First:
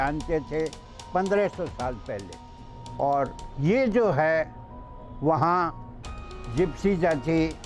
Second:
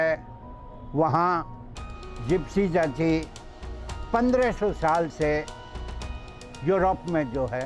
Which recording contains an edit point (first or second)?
first